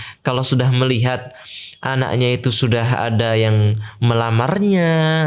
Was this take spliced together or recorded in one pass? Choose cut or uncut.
uncut